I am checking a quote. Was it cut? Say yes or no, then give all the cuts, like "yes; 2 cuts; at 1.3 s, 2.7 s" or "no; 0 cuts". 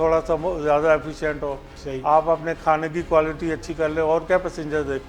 no; 0 cuts